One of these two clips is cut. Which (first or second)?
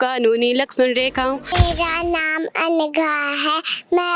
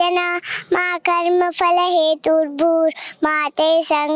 first